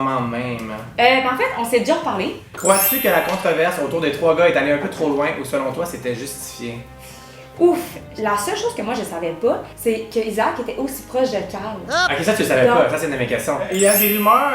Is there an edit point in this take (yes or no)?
yes